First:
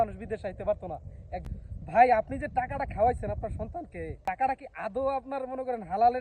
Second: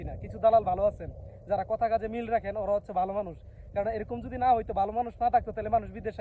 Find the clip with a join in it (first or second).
first